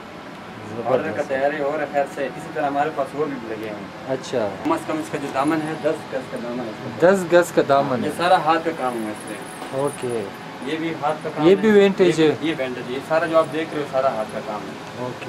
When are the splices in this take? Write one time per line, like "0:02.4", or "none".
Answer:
0:04.7

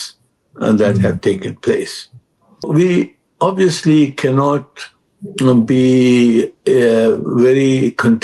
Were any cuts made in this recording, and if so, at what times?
0:02.7

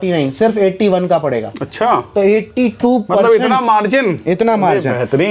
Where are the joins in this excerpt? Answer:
none

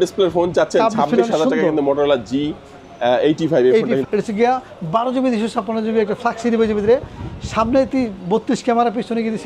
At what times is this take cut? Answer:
0:04.0

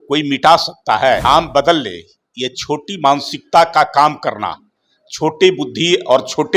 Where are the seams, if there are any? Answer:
0:01.2

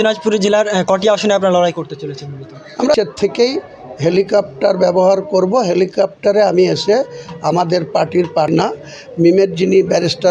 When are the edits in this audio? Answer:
0:03.0
0:08.5

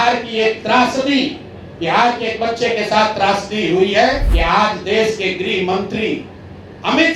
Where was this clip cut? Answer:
0:04.3

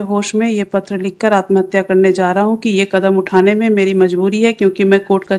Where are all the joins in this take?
none

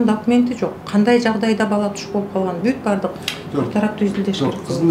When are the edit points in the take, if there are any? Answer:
none

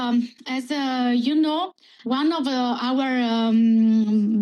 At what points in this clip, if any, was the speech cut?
none

